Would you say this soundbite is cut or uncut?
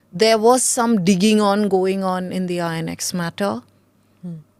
uncut